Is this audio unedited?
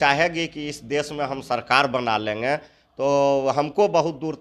yes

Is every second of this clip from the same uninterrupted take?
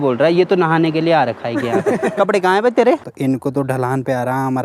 no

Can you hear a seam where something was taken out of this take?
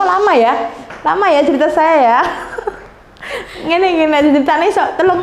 no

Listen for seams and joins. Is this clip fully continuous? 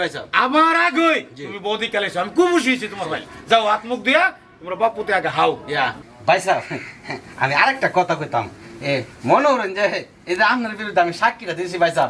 yes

